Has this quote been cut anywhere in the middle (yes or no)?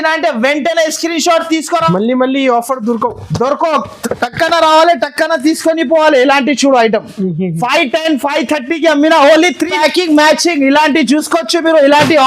yes